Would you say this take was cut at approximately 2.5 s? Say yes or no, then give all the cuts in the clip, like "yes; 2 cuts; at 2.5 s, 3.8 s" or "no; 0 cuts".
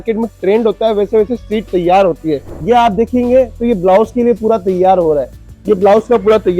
yes; 1 cut; at 2.5 s